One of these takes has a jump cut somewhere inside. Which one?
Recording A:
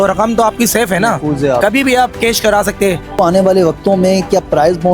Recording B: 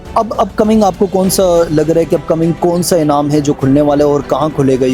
A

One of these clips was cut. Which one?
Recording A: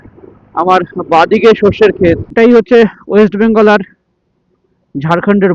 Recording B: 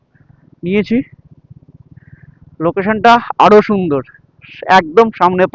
A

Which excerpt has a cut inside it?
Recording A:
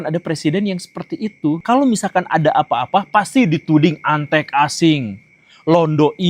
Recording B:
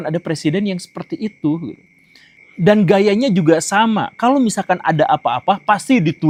A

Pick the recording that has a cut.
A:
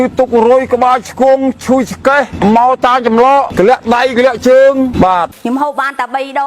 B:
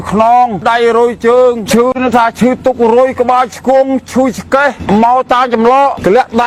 A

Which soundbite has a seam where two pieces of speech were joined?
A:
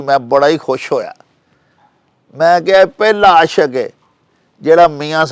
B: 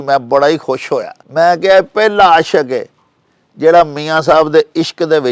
B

